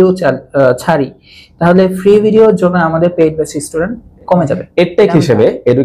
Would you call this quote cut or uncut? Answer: cut